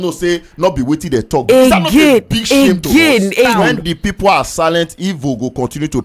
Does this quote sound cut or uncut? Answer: cut